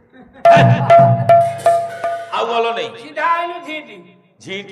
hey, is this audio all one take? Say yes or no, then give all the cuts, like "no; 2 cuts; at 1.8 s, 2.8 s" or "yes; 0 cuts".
no; 1 cut; at 2.4 s